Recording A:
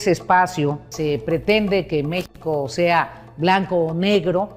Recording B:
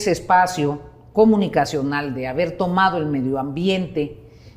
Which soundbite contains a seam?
A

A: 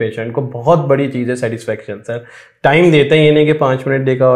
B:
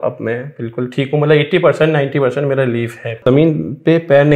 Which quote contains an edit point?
B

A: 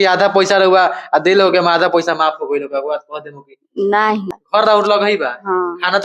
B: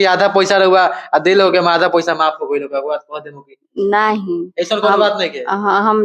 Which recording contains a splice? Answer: A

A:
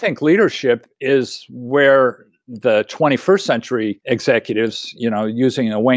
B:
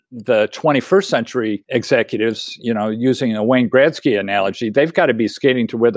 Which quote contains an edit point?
A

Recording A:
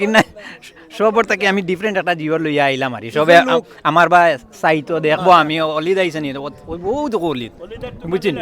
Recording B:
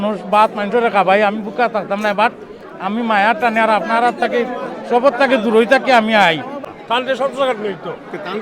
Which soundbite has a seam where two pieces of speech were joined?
B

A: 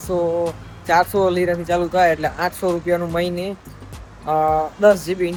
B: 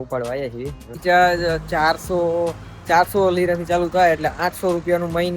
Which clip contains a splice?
B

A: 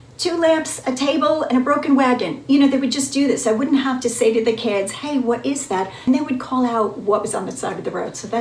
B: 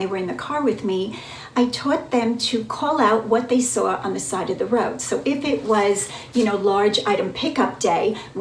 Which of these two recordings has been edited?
A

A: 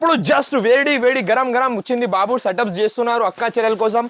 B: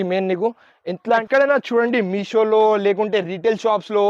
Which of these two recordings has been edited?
B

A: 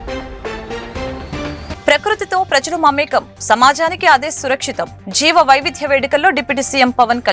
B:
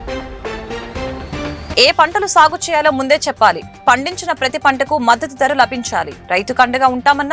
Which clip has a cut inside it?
B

